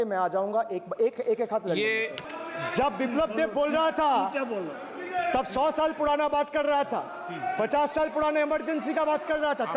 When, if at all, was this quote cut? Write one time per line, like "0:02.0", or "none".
0:02.2